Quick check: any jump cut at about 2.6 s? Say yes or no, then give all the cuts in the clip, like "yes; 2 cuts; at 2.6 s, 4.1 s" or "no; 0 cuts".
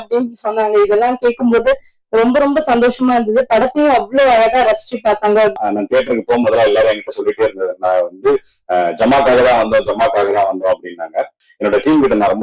no; 2 cuts; at 5.6 s, 11.4 s